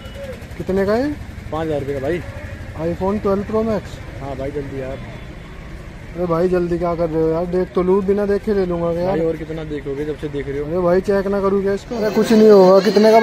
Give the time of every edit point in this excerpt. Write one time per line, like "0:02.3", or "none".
0:12.0